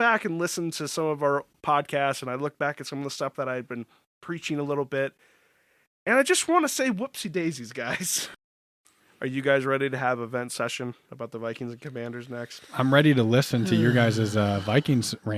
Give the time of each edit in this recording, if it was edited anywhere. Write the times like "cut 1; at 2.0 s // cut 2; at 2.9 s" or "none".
cut 1; at 8.4 s